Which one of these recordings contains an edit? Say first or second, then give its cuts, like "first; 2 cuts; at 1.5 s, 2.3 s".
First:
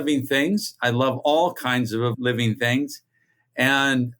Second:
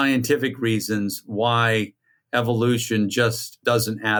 first; 1 cut; at 2.1 s